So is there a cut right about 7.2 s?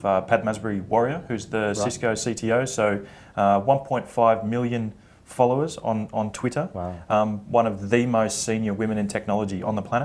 yes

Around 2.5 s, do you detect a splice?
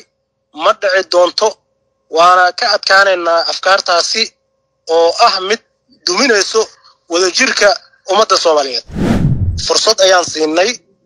no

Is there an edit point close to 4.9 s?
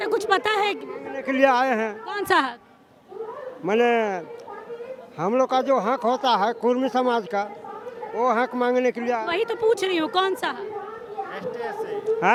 no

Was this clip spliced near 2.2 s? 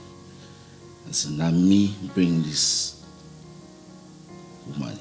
no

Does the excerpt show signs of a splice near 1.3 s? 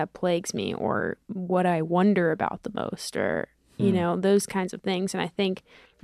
yes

